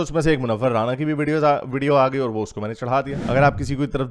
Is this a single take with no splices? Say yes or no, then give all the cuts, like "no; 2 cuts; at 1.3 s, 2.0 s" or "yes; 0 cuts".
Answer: no; 1 cut; at 3.1 s